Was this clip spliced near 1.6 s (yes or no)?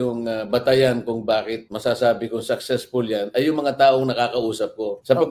yes